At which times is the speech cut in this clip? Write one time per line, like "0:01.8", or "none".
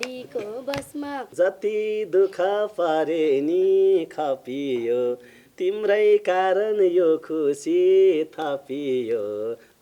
0:01.3

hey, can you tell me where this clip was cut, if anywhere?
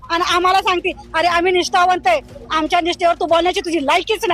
none

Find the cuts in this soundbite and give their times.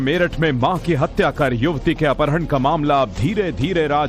0:02.1

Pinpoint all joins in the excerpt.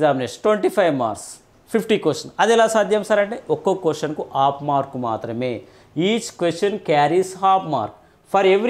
none

